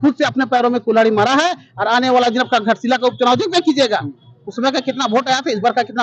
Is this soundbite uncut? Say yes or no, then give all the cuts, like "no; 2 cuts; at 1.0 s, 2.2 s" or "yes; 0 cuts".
yes; 0 cuts